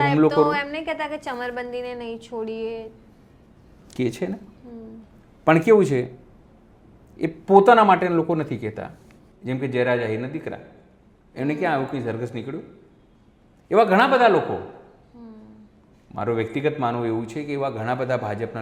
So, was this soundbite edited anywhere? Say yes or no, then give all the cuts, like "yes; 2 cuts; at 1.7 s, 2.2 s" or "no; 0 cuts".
no; 0 cuts